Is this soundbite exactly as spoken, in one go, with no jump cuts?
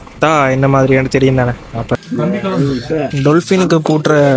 no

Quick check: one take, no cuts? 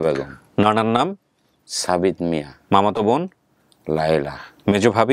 yes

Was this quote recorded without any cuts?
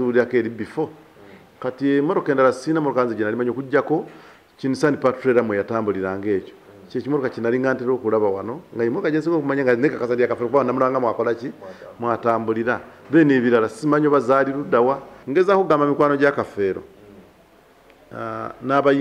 no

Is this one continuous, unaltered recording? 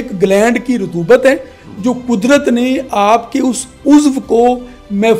yes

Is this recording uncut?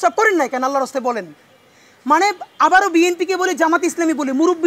yes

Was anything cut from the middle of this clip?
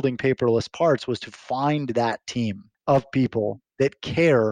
yes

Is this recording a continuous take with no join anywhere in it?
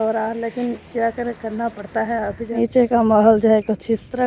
no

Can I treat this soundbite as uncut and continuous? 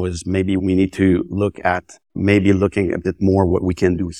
yes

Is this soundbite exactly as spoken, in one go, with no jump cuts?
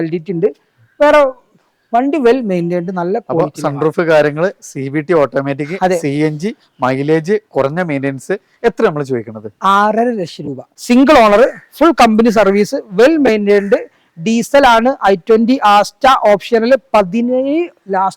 no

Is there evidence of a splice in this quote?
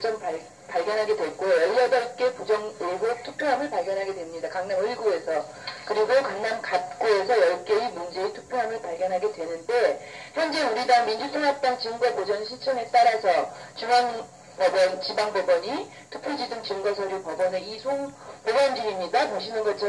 yes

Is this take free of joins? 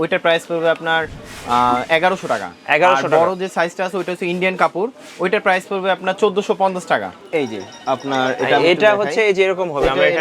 no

